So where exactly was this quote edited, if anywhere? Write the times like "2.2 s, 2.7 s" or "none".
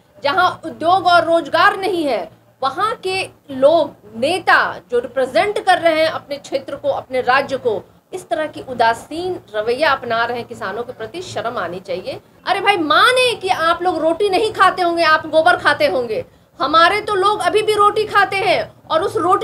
12.3 s